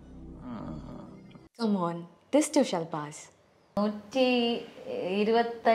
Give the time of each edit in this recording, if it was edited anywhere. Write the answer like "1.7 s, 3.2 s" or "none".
3.7 s